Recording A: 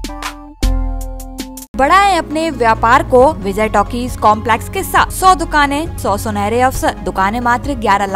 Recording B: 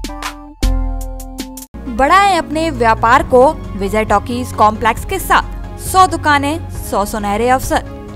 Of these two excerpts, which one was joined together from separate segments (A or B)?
A